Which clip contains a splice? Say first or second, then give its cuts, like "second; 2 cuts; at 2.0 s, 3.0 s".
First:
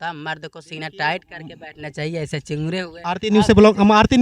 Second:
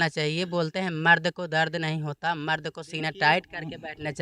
first; 1 cut; at 3.0 s